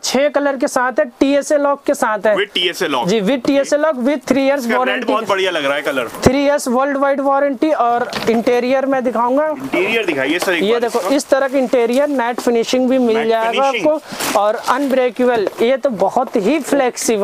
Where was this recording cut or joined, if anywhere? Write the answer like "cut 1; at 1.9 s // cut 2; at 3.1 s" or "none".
none